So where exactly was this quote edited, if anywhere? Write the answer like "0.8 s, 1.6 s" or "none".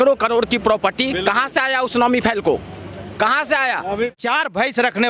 4.2 s